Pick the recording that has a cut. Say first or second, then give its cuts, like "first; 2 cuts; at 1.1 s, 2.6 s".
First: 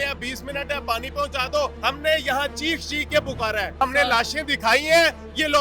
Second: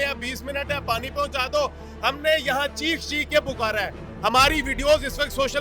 first; 2 cuts; at 1.8 s, 3.8 s